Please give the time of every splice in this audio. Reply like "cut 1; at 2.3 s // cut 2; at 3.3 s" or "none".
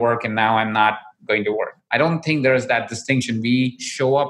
cut 1; at 1.8 s